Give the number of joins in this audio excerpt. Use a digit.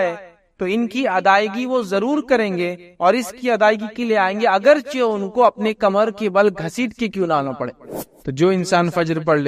1